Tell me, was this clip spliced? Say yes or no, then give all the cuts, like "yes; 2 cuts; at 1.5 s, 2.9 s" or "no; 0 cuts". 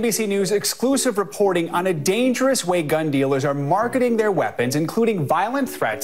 no; 0 cuts